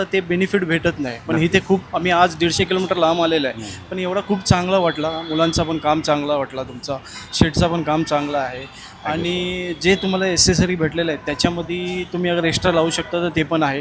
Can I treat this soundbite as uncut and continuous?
yes; 0 cuts

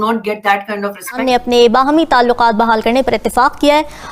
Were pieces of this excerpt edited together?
yes; 1 cut; at 1.2 s

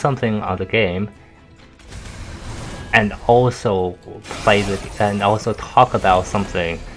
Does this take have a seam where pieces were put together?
no; 0 cuts

